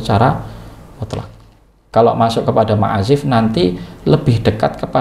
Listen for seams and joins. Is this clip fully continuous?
no; 1 cut; at 1.8 s

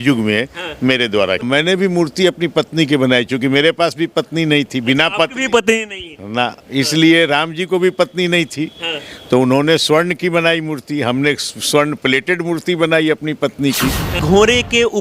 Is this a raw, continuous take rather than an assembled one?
no; 2 cuts; at 1.4 s, 14.2 s

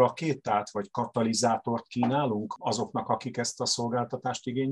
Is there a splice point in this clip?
yes; 1 cut; at 2.5 s

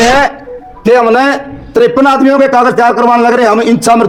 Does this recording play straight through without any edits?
yes; 0 cuts

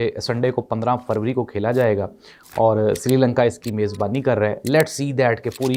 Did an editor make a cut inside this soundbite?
no; 0 cuts

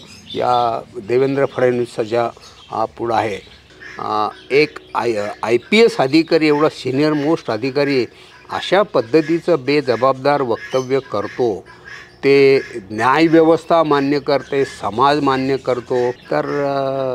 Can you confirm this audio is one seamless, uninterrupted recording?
no; 2 cuts; at 3.6 s, 16.2 s

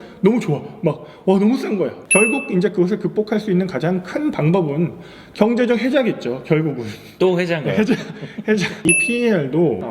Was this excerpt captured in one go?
no; 2 cuts; at 2.0 s, 9.0 s

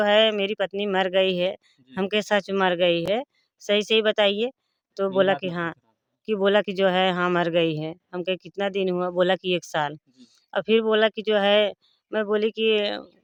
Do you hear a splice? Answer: no; 0 cuts

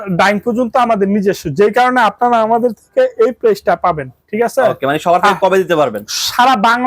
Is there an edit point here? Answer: no; 0 cuts

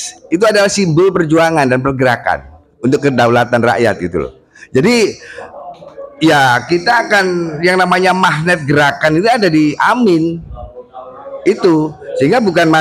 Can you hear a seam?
no; 0 cuts

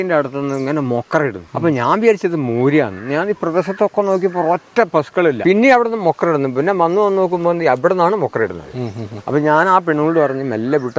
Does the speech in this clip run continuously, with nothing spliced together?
no; 2 cuts; at 1.4 s, 5.4 s

